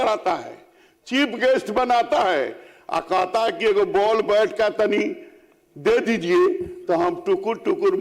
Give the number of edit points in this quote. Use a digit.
0